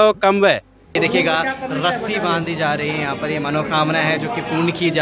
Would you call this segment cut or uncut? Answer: cut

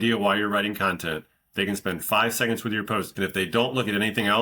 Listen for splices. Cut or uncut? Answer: uncut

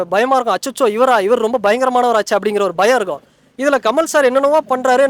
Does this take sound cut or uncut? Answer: uncut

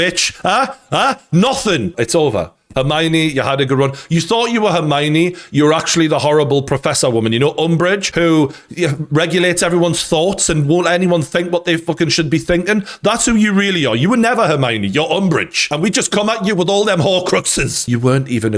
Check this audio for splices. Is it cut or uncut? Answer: cut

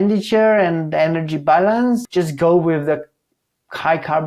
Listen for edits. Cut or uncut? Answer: cut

